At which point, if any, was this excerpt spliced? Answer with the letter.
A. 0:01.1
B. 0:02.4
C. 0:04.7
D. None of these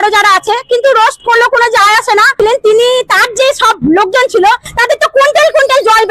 B